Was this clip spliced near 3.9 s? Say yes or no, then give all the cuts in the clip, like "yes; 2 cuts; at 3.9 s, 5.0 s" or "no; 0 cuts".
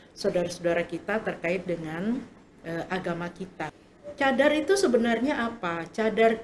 yes; 1 cut; at 3.9 s